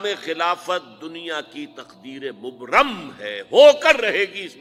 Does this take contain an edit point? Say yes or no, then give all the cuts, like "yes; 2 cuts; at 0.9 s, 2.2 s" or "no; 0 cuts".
no; 0 cuts